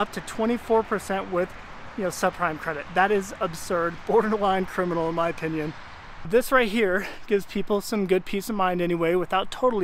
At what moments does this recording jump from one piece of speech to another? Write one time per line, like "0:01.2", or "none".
0:06.2